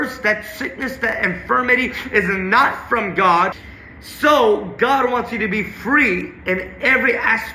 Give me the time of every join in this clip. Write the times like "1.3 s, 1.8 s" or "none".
3.6 s